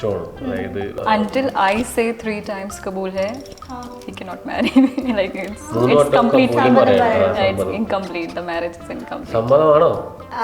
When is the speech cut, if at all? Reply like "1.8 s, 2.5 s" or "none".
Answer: 1.0 s

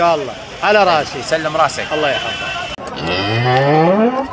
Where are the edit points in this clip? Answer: 2.8 s

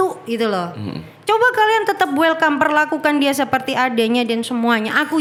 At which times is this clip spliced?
none

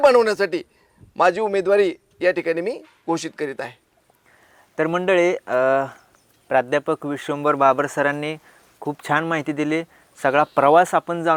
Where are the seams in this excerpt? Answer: none

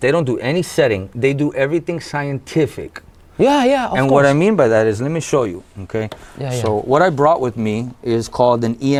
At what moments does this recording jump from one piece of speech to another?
none

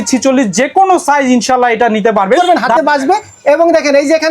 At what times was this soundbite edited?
2.4 s

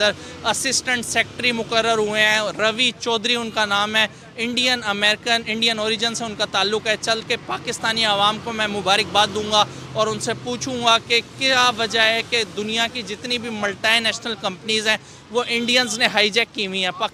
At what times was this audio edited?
none

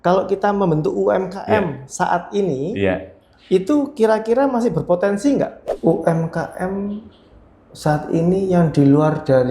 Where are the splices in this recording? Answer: 5.6 s

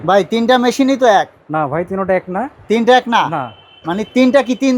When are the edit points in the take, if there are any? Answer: none

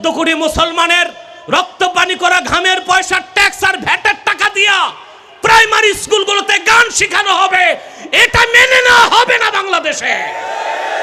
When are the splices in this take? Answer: none

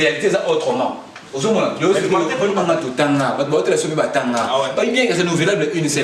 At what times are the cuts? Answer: 2.5 s

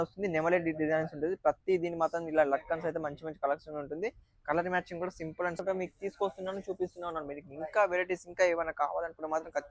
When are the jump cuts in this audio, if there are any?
5.6 s

